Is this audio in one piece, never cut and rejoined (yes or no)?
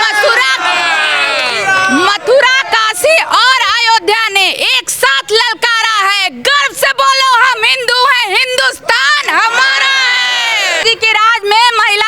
no